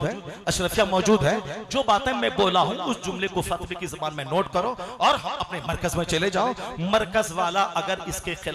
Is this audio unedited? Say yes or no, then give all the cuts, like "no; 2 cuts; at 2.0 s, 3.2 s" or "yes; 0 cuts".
yes; 0 cuts